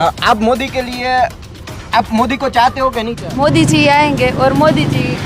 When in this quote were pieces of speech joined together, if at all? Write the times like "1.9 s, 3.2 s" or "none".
3.2 s